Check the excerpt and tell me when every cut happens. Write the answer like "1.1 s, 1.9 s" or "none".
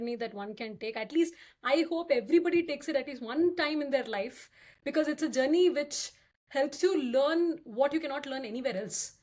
none